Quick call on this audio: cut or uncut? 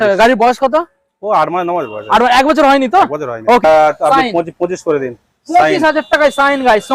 cut